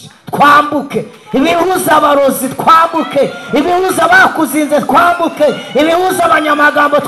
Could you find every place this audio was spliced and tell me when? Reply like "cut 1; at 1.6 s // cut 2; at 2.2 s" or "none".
none